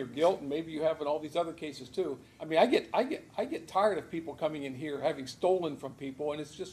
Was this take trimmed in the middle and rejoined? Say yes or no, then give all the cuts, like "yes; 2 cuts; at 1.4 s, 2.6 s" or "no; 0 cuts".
yes; 1 cut; at 2.3 s